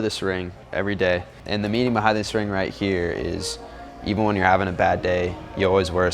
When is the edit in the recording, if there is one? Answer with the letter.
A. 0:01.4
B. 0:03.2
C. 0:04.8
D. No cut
A